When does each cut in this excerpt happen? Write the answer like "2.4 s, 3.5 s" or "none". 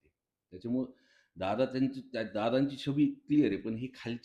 none